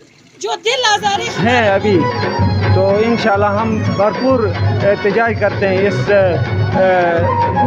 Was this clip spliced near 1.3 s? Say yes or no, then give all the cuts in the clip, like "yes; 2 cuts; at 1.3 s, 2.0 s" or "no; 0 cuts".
yes; 1 cut; at 1.3 s